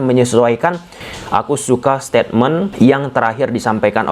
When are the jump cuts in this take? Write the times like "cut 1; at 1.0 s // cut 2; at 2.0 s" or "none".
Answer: cut 1; at 1.0 s // cut 2; at 2.7 s